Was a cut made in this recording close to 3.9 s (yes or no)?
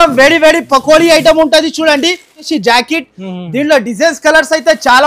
no